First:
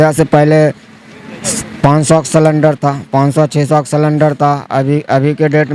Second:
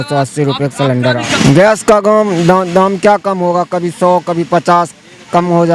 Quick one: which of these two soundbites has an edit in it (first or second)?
second